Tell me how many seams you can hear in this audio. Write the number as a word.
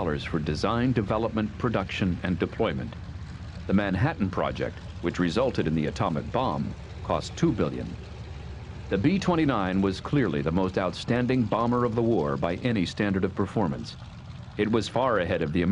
one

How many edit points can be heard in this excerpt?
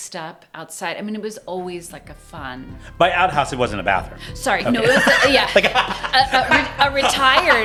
zero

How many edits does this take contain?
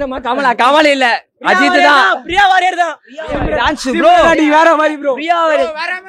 zero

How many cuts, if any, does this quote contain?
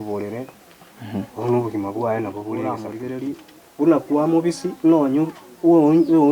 one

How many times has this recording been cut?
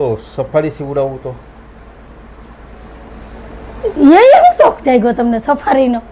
zero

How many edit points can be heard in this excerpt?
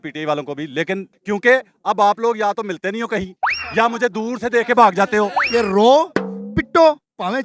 two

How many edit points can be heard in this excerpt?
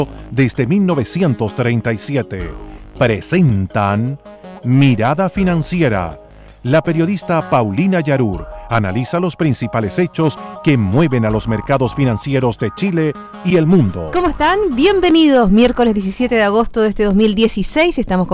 one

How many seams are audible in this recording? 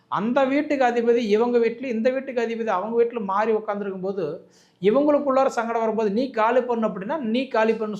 zero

